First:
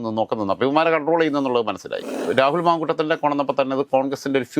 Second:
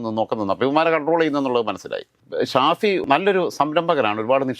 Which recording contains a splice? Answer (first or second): first